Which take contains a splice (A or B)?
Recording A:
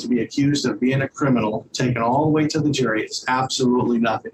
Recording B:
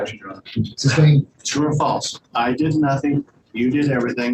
B